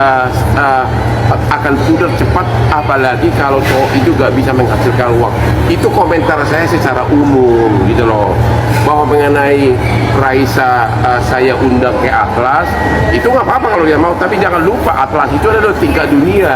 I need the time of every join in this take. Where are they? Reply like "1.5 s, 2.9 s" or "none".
none